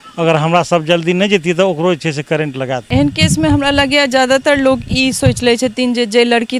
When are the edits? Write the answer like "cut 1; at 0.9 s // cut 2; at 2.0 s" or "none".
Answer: cut 1; at 2.8 s